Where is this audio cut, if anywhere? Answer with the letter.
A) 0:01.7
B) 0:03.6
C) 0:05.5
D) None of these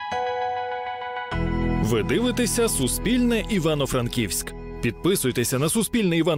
D